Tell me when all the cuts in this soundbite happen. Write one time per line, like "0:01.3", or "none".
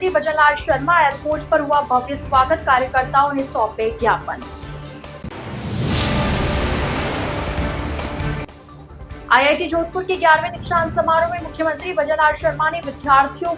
none